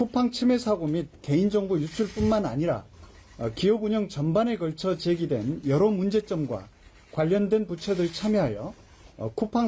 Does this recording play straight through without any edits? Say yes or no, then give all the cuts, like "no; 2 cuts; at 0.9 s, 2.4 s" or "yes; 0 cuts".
yes; 0 cuts